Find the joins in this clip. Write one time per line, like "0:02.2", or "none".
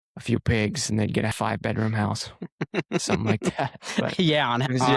0:01.3